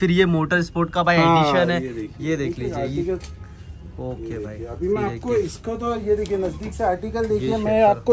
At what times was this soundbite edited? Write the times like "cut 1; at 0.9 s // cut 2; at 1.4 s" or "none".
none